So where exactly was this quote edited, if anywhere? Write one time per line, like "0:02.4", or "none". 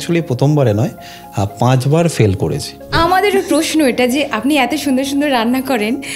0:02.9